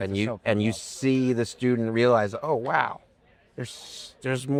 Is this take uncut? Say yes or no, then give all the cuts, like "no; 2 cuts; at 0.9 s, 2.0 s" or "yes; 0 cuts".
yes; 0 cuts